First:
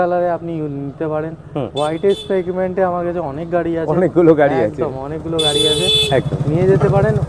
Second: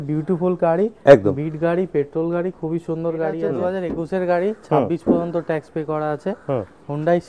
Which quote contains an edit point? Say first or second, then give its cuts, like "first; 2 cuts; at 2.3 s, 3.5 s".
second; 1 cut; at 3.6 s